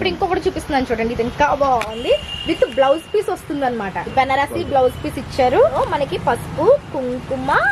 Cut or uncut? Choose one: cut